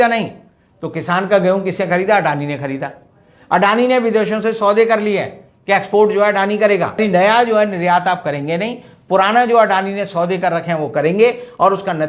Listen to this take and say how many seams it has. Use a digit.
1